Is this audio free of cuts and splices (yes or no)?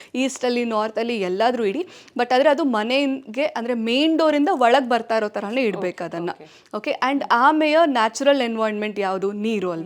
yes